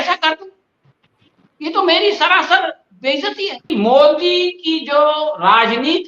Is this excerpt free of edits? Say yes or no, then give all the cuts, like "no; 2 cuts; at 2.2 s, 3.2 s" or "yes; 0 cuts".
no; 1 cut; at 3.7 s